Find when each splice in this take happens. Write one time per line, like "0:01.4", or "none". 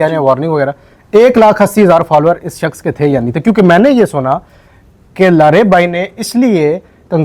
none